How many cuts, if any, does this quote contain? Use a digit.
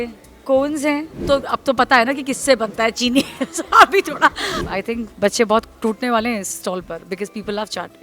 2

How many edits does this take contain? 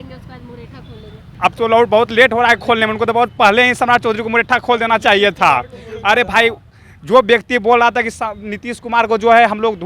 1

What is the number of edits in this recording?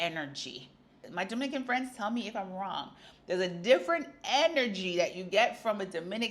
1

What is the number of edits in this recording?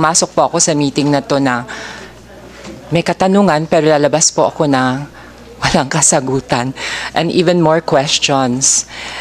0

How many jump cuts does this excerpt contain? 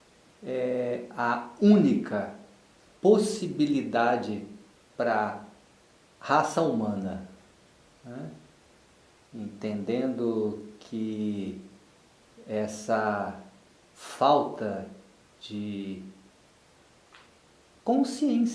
1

